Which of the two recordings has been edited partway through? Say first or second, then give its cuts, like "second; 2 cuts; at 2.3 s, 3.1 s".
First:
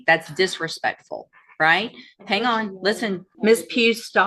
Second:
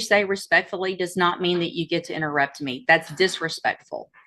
first; 1 cut; at 3.3 s